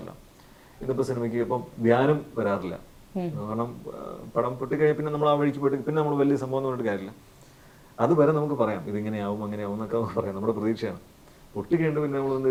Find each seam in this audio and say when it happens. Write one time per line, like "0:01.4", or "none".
none